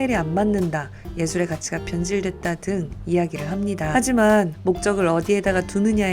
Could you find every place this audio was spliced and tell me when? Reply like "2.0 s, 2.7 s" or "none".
3.9 s